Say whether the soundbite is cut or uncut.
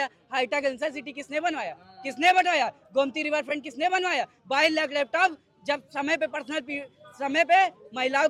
uncut